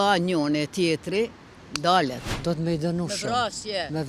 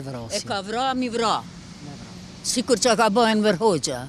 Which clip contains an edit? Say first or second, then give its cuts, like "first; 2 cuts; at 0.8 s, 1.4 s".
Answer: first; 1 cut; at 2.3 s